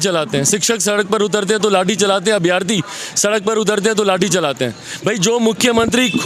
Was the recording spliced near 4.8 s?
no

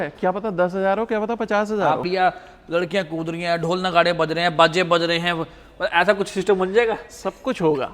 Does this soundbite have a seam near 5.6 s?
no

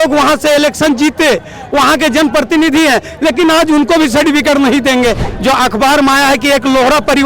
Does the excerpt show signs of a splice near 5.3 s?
yes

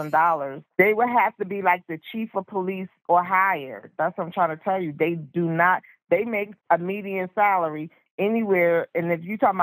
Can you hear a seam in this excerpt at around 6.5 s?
yes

